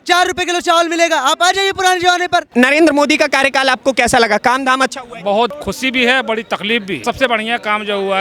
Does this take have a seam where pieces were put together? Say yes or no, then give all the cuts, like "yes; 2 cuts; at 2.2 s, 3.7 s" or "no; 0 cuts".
yes; 3 cuts; at 2.5 s, 5.5 s, 7.0 s